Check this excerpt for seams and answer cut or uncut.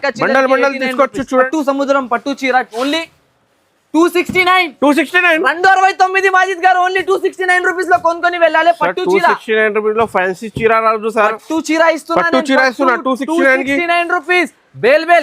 cut